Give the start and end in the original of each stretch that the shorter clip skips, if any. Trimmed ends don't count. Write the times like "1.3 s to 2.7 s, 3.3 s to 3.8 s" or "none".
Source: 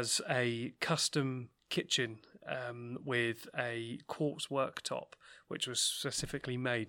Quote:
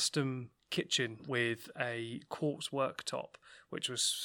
2.2 s to 3.0 s

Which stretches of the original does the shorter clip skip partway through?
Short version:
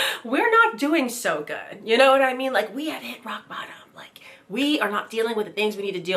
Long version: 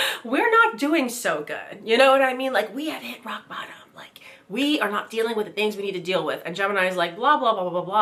none

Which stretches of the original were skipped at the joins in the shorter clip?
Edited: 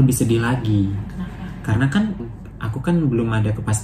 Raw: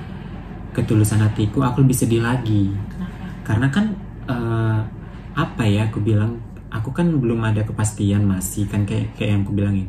4.1 s to 6.4 s

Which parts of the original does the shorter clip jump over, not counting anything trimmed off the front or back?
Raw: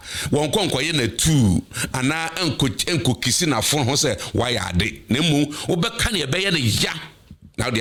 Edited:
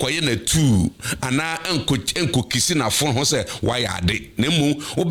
none

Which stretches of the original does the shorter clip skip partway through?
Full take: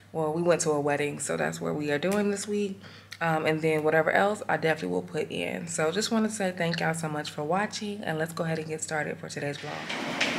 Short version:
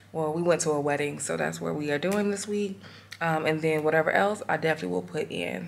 none

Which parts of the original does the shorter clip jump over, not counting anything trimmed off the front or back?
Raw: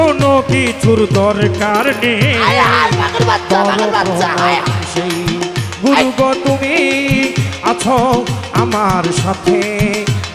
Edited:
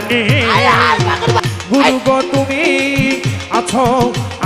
3.3 s to 5.5 s

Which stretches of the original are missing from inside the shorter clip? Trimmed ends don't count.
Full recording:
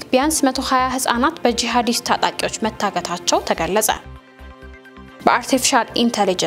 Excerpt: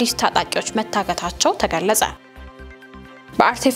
none

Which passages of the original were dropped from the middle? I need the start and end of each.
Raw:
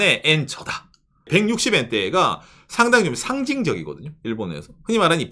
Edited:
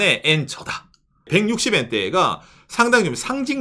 none

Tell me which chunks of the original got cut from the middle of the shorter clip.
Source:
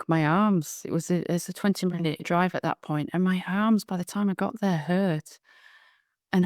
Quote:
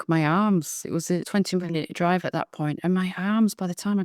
1.2 s to 1.5 s

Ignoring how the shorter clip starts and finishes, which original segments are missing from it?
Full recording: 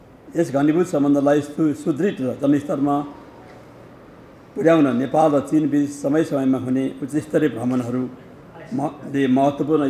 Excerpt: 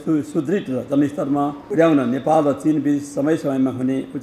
3.1 s to 4.5 s

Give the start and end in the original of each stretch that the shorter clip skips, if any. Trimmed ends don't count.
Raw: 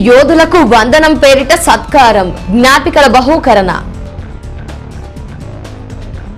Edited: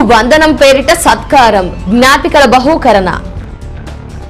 3.9 s to 4.1 s

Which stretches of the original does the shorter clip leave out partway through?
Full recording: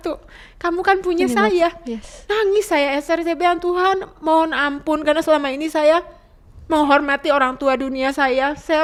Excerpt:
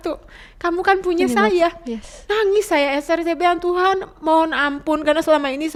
none

